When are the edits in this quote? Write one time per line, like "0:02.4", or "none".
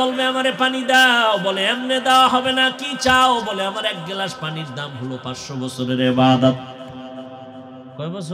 none